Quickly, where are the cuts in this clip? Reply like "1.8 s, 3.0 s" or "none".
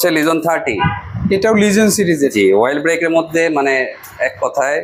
none